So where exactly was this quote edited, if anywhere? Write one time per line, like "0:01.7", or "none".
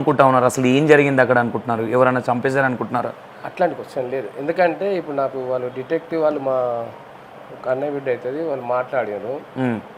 none